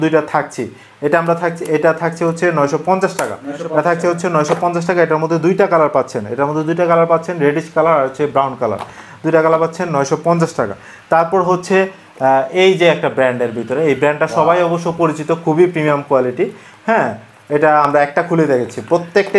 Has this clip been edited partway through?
no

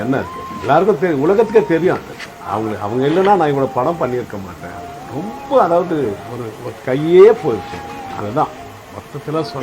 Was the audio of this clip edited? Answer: yes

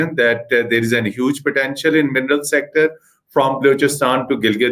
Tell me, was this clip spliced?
no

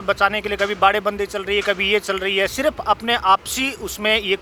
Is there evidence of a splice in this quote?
no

